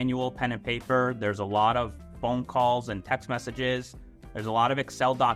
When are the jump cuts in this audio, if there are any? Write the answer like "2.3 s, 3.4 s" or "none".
none